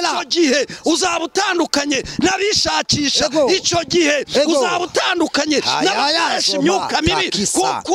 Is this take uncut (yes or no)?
yes